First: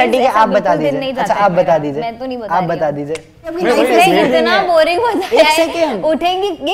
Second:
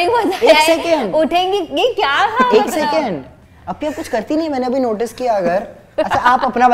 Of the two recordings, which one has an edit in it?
first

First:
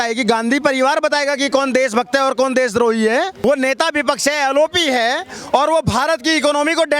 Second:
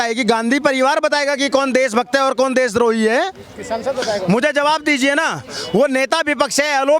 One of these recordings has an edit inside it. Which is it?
first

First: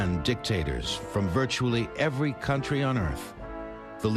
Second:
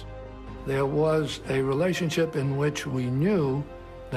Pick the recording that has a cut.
first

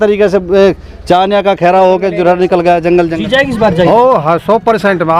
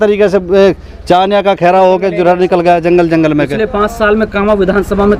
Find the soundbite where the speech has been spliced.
first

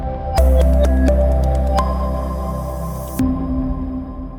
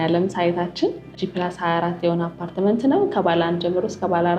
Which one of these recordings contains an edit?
second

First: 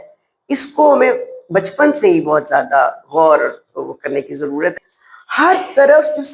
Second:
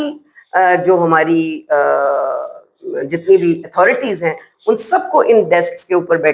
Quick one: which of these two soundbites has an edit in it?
first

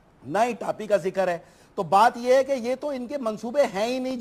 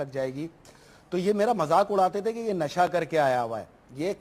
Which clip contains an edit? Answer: second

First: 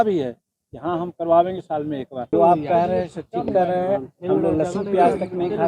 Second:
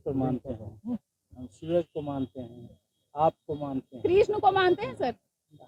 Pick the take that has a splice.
first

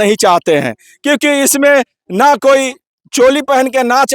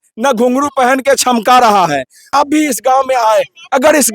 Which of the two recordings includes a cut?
second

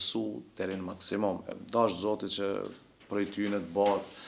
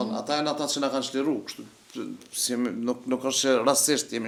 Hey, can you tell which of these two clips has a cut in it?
first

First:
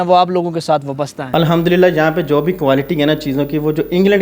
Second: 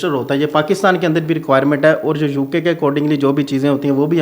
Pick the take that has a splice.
first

